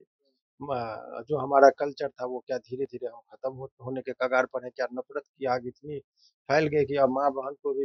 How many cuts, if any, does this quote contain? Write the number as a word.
zero